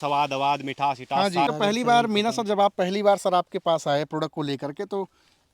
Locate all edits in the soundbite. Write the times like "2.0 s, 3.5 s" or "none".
1.5 s